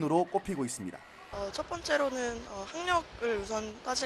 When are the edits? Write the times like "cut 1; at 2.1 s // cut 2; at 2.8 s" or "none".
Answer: cut 1; at 1.5 s

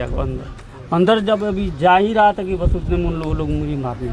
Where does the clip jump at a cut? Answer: none

